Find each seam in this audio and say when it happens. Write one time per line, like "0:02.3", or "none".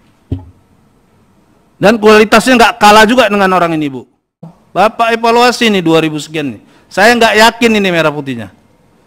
0:04.5